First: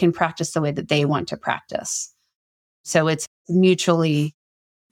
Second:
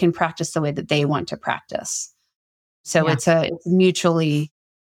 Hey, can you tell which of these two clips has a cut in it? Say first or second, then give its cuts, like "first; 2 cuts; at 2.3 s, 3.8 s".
first; 1 cut; at 3.3 s